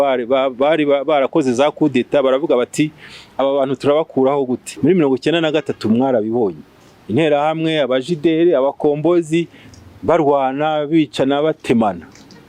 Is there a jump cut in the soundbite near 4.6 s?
yes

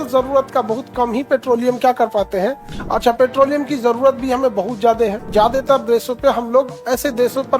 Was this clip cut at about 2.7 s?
yes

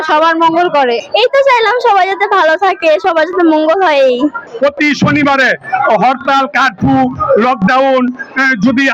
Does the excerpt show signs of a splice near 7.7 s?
no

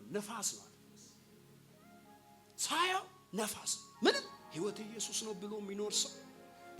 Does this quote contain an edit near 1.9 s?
no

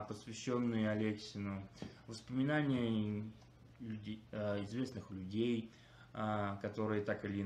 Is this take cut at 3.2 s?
no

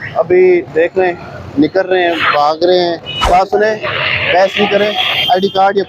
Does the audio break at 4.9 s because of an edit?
no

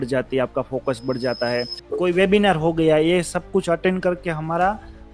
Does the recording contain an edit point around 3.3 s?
no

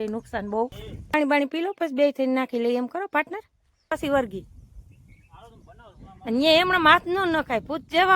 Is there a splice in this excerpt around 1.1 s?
yes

